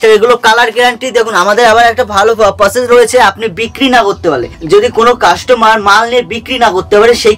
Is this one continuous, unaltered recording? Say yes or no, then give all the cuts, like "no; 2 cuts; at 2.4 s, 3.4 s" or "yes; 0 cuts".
yes; 0 cuts